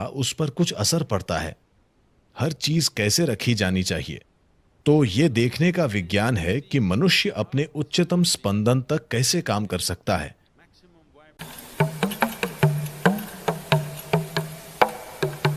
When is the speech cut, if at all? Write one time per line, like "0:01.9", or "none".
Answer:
none